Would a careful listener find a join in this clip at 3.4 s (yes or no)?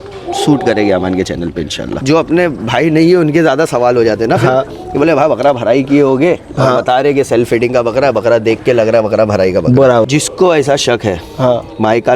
no